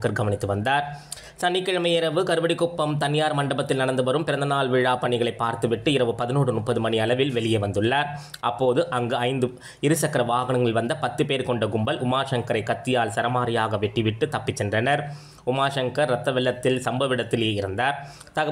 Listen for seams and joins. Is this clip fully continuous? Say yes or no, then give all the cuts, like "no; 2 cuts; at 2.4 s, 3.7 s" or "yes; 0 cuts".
yes; 0 cuts